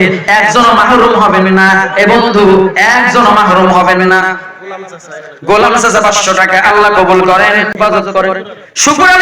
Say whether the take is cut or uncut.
cut